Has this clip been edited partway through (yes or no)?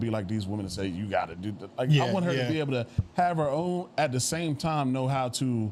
no